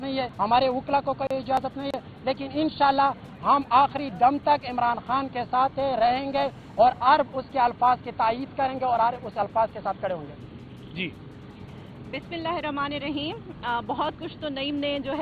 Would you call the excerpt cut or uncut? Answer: uncut